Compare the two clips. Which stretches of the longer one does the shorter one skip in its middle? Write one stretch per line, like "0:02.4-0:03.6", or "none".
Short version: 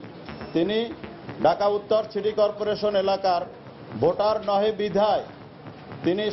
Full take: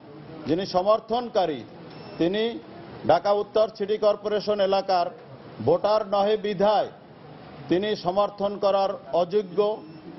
none